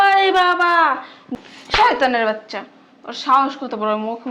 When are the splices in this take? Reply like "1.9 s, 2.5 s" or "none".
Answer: 1.2 s